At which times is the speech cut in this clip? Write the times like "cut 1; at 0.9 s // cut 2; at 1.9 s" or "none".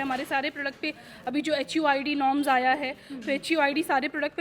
none